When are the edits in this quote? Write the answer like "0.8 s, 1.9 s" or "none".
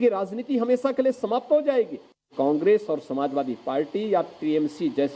2.3 s